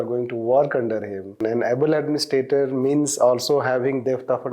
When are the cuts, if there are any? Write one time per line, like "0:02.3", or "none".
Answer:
0:01.3